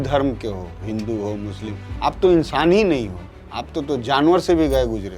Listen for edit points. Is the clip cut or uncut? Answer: uncut